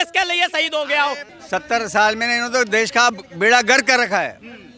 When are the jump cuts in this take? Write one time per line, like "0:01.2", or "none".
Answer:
0:01.3